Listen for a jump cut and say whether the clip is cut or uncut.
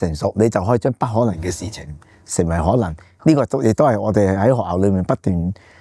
uncut